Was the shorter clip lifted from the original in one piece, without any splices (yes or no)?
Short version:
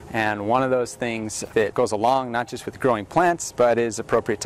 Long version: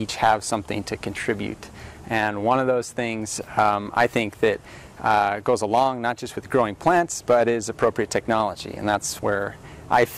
no